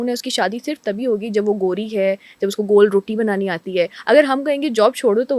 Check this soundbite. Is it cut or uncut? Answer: uncut